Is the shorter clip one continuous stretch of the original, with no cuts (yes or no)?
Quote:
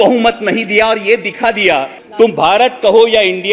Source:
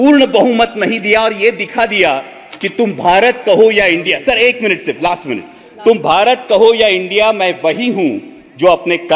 no